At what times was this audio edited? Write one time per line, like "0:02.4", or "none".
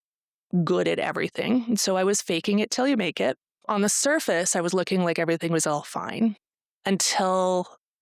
0:03.7